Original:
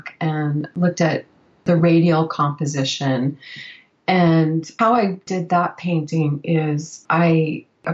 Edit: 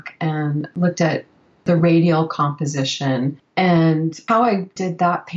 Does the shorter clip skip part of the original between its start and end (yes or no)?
yes